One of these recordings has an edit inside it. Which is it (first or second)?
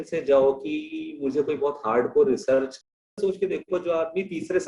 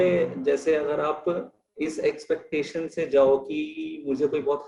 first